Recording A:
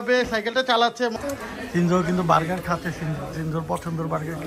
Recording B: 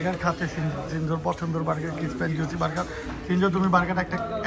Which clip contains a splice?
A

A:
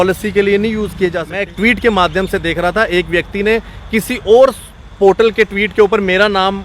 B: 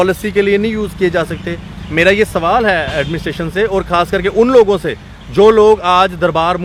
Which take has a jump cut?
A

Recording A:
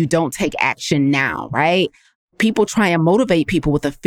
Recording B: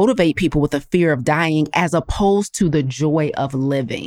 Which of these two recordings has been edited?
A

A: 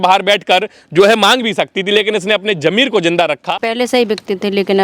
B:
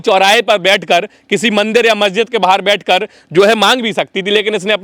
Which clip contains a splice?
A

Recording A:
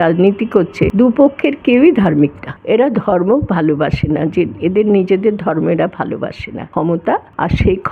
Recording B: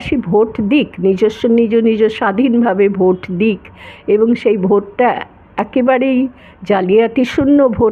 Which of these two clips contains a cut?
A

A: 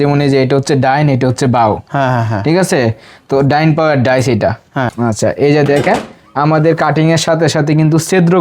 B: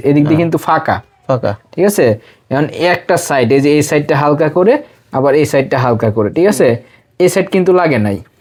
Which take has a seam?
A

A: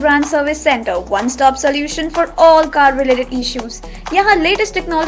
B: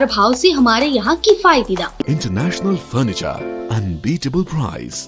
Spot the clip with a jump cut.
B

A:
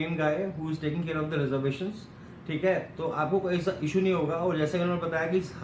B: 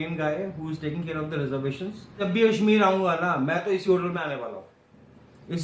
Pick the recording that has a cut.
B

